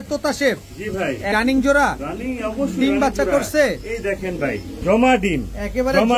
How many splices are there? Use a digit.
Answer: 1